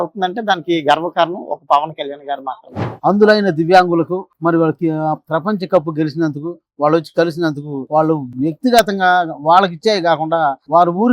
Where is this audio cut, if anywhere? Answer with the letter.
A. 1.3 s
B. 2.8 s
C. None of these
B